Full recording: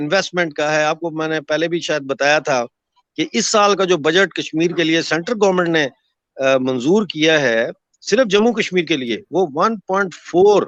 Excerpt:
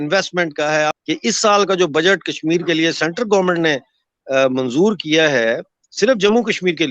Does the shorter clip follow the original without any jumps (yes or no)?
no